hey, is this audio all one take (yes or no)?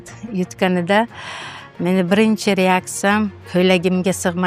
no